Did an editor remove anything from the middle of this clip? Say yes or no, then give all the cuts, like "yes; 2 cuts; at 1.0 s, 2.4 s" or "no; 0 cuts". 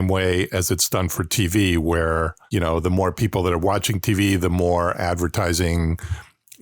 no; 0 cuts